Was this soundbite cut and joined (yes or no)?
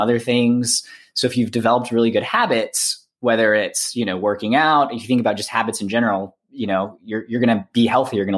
no